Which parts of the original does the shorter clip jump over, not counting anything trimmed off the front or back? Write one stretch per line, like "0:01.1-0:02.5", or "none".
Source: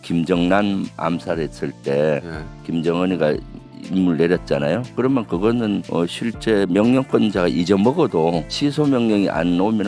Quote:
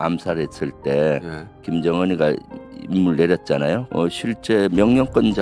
0:04.9-0:05.9